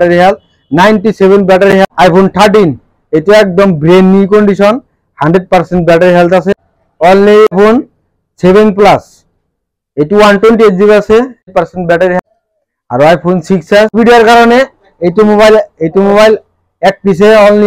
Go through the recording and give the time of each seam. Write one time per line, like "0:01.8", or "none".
0:01.8
0:07.5
0:12.2
0:14.0